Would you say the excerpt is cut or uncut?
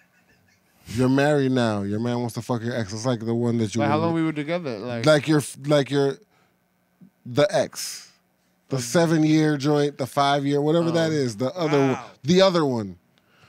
uncut